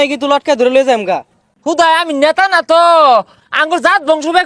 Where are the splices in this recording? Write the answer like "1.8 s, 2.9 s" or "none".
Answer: 1.5 s